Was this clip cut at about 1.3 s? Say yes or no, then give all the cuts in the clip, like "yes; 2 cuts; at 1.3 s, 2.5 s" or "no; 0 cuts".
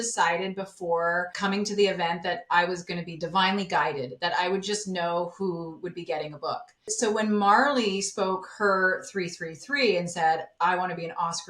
yes; 2 cuts; at 1.3 s, 6.9 s